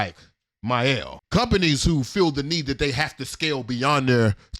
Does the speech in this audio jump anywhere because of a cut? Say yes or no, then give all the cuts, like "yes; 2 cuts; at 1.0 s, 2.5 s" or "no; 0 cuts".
yes; 1 cut; at 1.2 s